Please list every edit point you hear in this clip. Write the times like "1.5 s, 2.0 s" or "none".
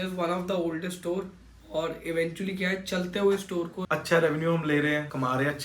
3.8 s